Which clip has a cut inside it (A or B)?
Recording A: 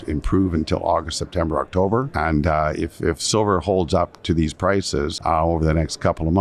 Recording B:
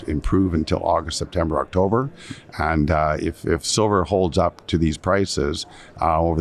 A